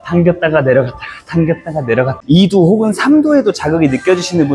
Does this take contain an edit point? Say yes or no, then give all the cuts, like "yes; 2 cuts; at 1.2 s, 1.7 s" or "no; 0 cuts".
yes; 1 cut; at 2.2 s